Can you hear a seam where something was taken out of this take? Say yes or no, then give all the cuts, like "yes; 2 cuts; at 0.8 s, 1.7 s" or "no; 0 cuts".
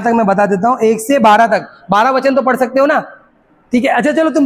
no; 0 cuts